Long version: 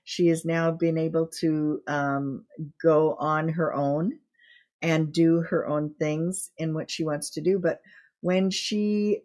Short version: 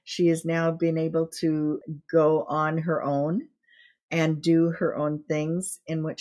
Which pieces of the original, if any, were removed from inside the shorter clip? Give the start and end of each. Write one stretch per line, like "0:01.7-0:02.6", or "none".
0:01.8-0:02.5